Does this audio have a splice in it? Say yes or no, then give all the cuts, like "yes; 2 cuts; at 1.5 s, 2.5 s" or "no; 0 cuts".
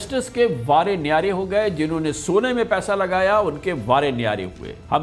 no; 0 cuts